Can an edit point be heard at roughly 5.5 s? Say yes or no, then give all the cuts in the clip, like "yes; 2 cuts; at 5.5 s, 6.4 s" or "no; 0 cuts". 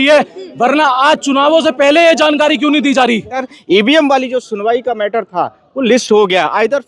no; 1 cut; at 3.5 s